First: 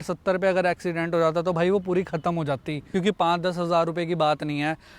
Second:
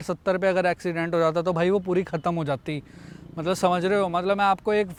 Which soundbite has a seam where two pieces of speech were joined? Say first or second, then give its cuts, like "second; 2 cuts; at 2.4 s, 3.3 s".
first; 1 cut; at 2.8 s